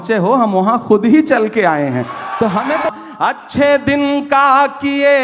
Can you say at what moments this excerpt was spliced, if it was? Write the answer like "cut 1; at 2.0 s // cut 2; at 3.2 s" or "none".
cut 1; at 2.9 s